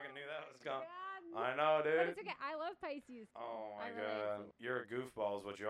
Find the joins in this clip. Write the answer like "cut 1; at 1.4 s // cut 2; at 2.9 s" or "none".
cut 1; at 3.2 s // cut 2; at 4.5 s